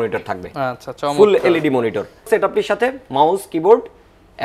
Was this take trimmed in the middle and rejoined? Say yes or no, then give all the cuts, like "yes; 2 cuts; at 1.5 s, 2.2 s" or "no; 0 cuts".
yes; 1 cut; at 2.3 s